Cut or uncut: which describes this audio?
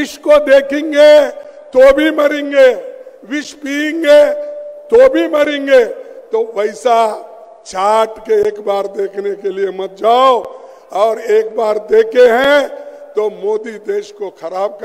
uncut